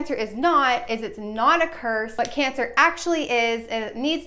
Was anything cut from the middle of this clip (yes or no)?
yes